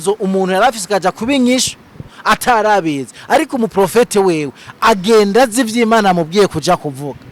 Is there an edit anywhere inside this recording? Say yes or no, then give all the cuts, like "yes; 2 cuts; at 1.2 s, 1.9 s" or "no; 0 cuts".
no; 0 cuts